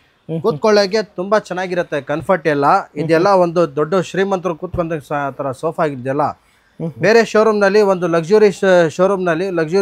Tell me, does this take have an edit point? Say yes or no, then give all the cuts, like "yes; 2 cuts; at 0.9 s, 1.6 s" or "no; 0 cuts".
no; 0 cuts